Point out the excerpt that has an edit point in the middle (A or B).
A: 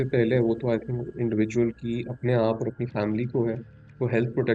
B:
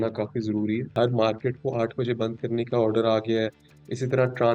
B